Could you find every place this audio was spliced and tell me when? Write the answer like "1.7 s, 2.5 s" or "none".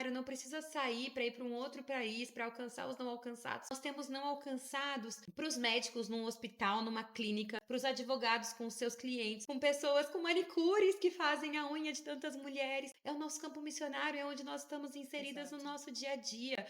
3.7 s, 5.2 s, 7.6 s, 9.4 s, 12.9 s

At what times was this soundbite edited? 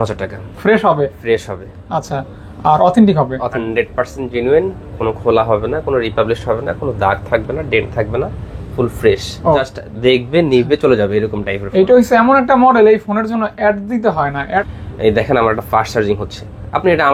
3.6 s, 9.7 s, 14.8 s

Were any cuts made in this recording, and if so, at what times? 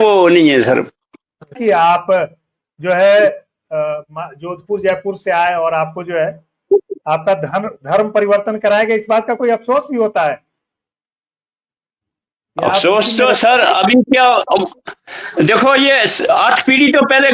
1.6 s

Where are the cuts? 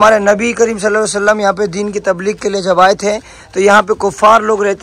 none

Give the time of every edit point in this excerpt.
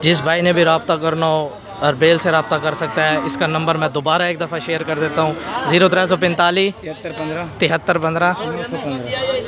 none

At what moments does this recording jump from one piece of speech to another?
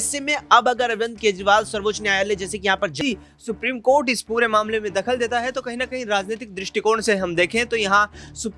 3.0 s

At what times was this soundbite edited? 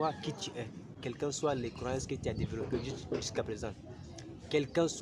1.0 s

